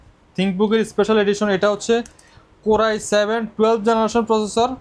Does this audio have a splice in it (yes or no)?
no